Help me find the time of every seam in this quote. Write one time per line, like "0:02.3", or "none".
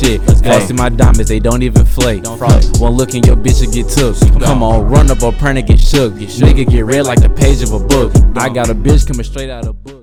none